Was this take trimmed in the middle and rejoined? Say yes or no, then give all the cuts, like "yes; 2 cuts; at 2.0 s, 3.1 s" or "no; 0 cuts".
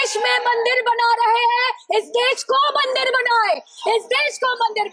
no; 0 cuts